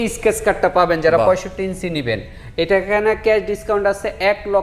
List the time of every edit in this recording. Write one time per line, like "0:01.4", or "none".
none

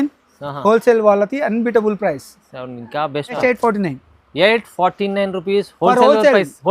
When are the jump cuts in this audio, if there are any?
0:03.4

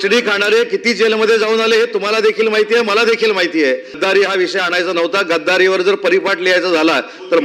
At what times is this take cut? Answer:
0:04.0

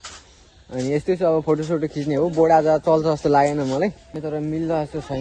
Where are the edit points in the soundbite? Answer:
0:04.1

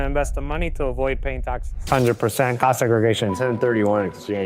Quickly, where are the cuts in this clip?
0:01.7

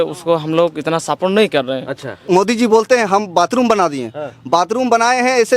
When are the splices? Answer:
0:02.1

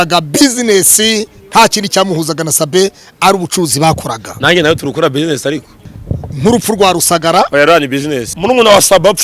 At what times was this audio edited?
0:05.8
0:08.3

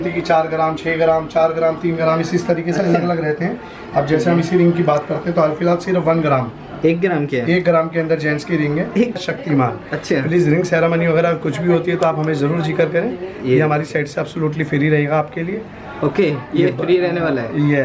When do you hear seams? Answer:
0:09.2

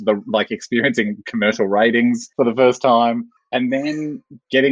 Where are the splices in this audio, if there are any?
0:02.3
0:03.4

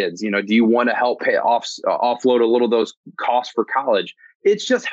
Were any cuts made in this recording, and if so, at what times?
0:01.2

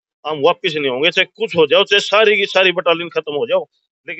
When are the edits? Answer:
none

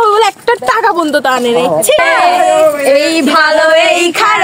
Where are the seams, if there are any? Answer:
0:02.0

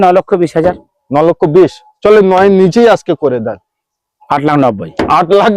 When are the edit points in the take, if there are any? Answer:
none

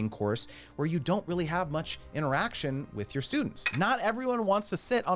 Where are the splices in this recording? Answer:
0:03.6

